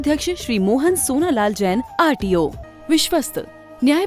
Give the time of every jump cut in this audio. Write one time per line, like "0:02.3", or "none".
0:02.6